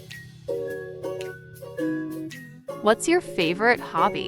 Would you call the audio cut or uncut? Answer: cut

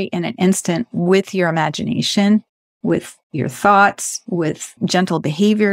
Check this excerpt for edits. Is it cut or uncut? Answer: cut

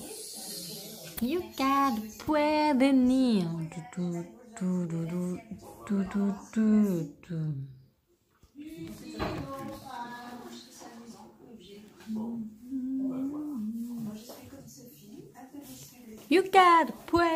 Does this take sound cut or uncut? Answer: cut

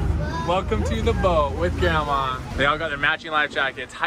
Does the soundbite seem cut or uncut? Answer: cut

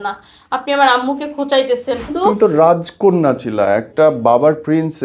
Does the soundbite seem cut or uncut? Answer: cut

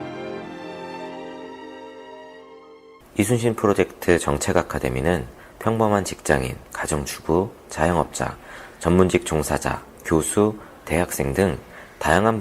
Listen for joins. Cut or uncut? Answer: cut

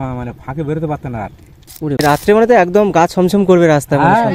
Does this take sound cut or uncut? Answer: cut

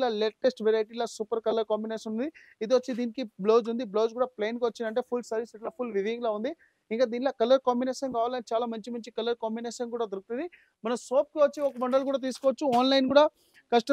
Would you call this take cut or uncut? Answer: uncut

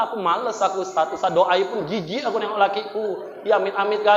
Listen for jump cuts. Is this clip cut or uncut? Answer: uncut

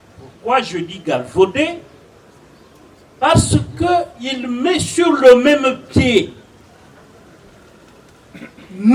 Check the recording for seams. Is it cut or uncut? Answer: uncut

